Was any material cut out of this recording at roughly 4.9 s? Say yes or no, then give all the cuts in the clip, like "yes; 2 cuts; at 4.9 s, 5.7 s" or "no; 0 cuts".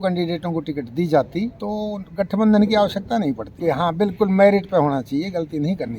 no; 2 cuts; at 1.6 s, 3.5 s